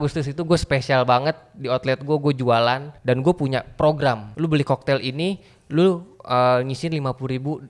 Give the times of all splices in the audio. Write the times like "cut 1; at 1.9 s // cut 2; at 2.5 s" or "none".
cut 1; at 2.9 s // cut 2; at 4.3 s